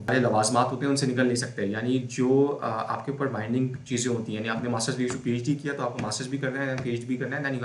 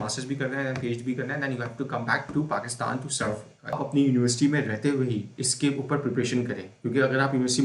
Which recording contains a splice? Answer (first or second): second